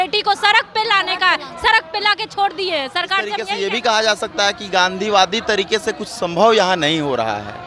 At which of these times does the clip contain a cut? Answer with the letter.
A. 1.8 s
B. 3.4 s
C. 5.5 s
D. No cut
B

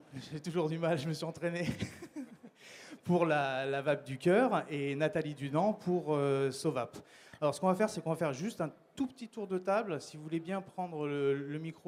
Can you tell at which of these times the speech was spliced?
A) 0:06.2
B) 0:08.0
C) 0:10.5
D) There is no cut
D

